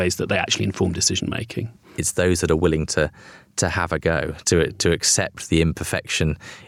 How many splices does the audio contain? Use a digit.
1